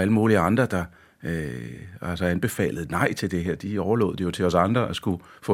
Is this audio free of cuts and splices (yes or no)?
yes